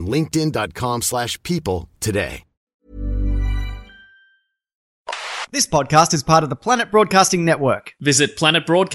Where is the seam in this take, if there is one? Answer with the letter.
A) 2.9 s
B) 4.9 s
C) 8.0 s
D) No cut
B